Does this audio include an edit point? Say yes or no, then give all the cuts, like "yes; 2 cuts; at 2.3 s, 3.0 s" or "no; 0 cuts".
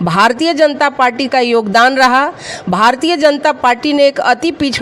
no; 0 cuts